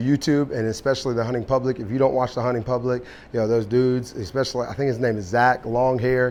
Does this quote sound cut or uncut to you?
uncut